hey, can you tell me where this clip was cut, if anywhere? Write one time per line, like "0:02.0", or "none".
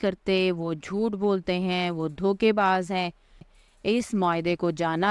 0:03.5